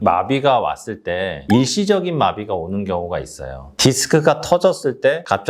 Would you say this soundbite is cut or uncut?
cut